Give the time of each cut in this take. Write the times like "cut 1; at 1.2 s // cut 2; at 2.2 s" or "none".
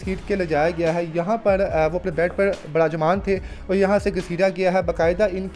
none